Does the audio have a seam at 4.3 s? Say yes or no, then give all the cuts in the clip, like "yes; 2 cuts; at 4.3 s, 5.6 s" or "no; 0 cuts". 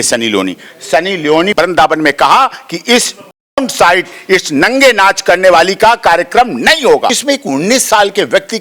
no; 2 cuts; at 1.5 s, 7.2 s